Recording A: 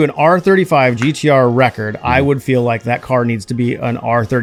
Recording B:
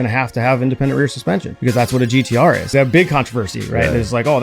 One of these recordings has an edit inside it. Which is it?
B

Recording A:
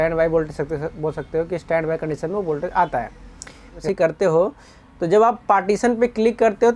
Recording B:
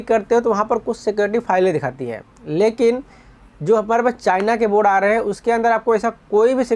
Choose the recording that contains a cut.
A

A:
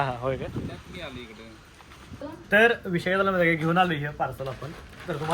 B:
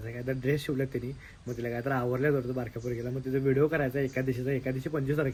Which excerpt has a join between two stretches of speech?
A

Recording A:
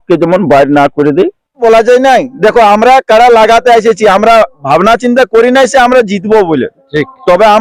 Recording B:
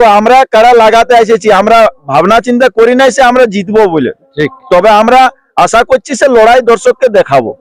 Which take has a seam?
A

